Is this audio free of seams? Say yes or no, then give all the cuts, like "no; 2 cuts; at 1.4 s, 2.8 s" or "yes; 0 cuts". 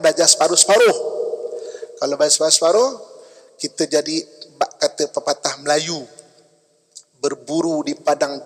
yes; 0 cuts